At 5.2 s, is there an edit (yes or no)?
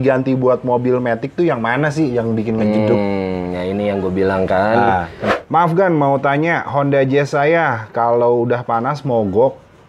yes